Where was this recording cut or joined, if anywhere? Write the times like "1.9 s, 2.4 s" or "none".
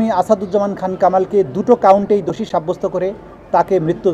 none